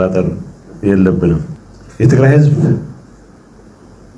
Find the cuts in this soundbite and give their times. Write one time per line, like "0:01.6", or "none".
none